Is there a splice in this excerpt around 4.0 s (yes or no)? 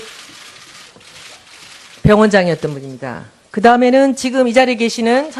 no